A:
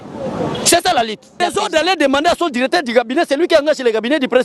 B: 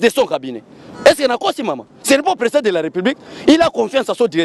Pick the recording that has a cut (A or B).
A